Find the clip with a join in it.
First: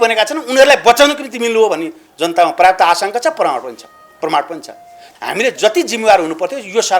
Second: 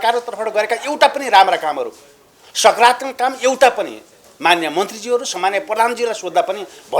first; 1 cut; at 5.0 s

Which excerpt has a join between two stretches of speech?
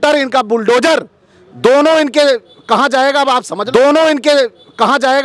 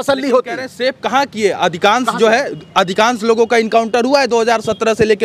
first; 1 cut; at 3.5 s

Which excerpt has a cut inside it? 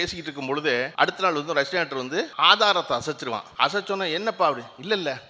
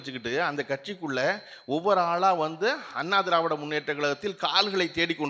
first; 3 cuts; at 0.9 s, 2.3 s, 3.5 s

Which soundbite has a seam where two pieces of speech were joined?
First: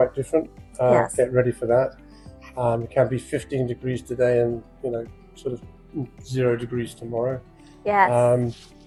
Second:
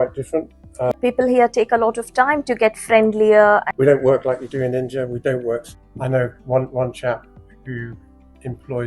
second; 3 cuts; at 0.9 s, 3.7 s, 5.8 s

